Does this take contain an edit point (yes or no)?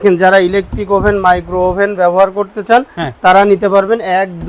no